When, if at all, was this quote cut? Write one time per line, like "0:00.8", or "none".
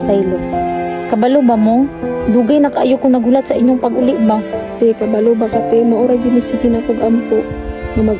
none

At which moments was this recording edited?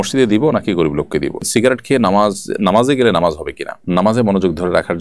0:01.4
0:03.8

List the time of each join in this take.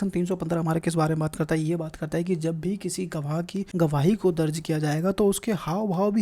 0:03.7

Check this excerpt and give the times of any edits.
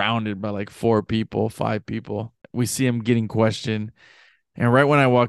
0:02.4

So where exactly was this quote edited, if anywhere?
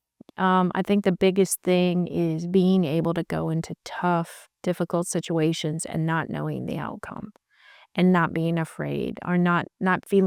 none

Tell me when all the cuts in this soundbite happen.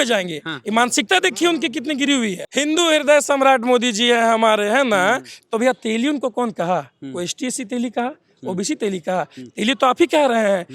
0:02.4

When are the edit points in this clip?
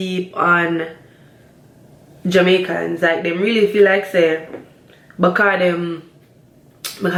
none

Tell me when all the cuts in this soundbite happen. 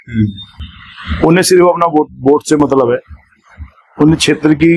none

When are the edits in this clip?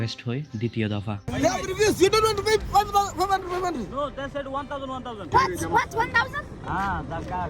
0:01.2
0:05.3

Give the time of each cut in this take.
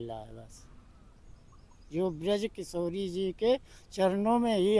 none

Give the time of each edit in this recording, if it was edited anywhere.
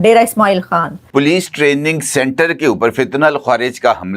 0:01.0

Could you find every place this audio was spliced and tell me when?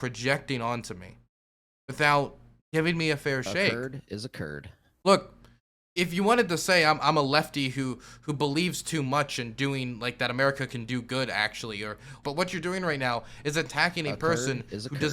0:12.1

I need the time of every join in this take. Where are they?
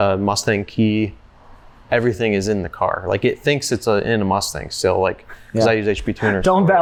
none

